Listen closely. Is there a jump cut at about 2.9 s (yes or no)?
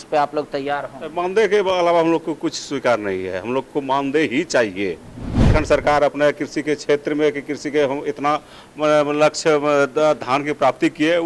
no